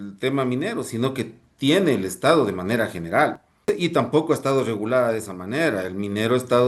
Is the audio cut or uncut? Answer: cut